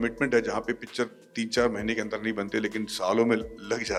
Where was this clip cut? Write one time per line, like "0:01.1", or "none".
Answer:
none